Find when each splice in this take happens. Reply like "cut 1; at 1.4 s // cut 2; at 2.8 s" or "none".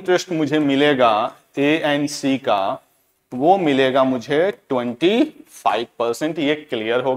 none